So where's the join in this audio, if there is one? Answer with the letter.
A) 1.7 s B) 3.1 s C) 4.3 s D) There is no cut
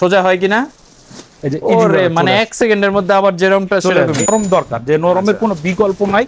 C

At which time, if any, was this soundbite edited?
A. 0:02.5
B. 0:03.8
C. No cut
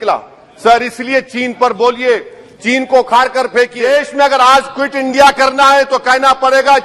B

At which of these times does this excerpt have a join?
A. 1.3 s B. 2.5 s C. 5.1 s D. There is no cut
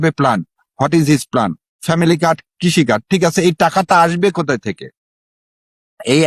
D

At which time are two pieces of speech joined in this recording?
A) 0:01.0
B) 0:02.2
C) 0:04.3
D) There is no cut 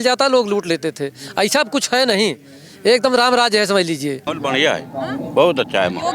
C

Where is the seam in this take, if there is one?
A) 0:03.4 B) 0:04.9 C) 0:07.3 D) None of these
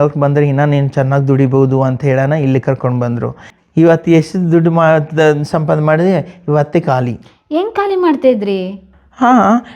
A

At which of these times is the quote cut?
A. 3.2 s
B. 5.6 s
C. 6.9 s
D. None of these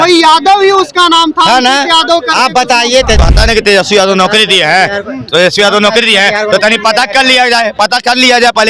A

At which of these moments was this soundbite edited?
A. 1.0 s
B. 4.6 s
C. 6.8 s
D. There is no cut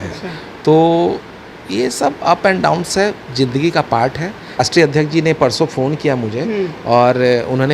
B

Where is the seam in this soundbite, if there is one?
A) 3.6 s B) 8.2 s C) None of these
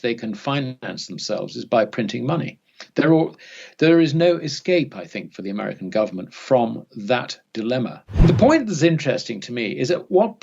B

